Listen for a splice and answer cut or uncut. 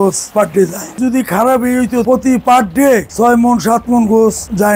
cut